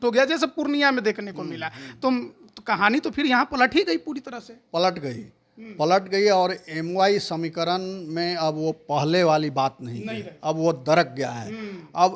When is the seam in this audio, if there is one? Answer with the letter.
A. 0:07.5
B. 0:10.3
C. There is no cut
C